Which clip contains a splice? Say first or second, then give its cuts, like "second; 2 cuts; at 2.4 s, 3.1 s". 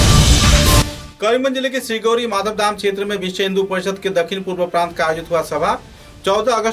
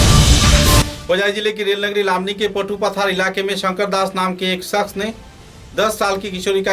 second; 1 cut; at 1.0 s